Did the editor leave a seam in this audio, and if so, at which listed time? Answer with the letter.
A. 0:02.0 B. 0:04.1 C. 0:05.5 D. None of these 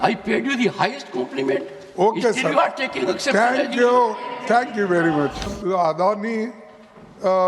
C